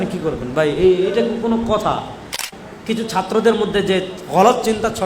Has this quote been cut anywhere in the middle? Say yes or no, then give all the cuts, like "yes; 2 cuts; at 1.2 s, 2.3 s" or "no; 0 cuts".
yes; 1 cut; at 2.4 s